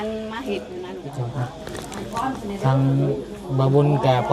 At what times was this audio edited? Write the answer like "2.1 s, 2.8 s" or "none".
0.9 s